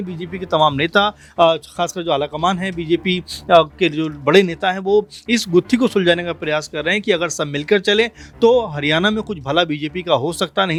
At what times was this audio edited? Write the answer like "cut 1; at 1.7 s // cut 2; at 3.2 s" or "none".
none